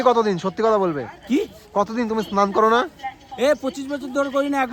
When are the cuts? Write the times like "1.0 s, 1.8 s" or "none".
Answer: none